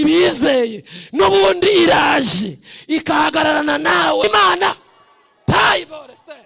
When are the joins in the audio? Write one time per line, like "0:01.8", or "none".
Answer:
0:04.2